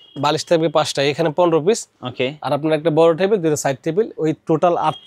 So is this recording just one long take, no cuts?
yes; 0 cuts

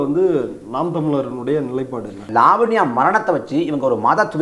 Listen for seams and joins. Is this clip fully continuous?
no; 1 cut; at 2.2 s

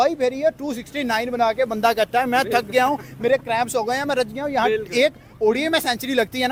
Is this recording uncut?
yes; 0 cuts

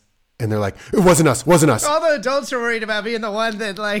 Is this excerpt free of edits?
no; 1 cut; at 1.9 s

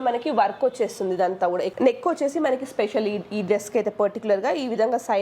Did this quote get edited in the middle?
yes; 1 cut; at 1.7 s

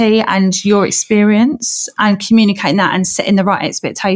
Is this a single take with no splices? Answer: no; 1 cut; at 1.9 s

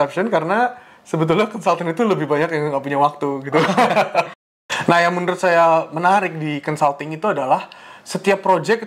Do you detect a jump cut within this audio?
yes; 1 cut; at 4.4 s

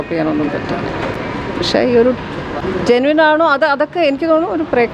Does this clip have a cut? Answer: no; 0 cuts

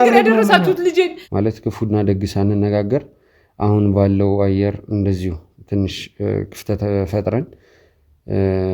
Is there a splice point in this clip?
yes; 1 cut; at 1.2 s

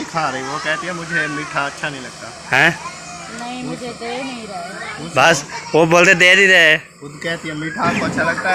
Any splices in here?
no; 0 cuts

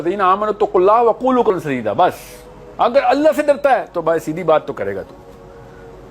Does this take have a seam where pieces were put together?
yes; 1 cut; at 1.5 s

